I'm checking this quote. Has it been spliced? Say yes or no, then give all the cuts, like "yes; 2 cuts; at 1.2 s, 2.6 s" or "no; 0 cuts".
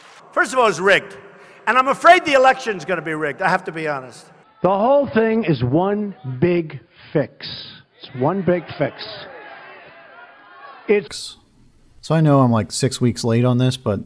no; 0 cuts